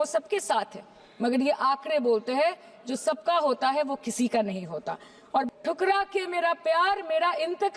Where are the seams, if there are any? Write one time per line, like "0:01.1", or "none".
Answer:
0:05.4